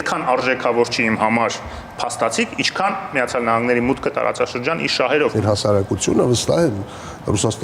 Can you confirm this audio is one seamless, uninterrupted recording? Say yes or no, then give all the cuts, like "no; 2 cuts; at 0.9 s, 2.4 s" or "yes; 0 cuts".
no; 1 cut; at 5.4 s